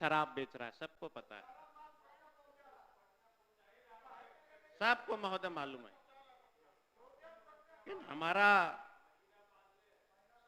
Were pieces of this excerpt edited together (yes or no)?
no